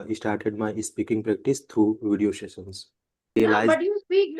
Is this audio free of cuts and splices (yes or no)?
no